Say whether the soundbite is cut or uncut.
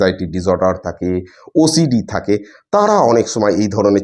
uncut